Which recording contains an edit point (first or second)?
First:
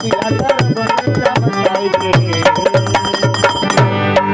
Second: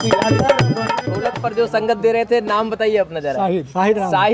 second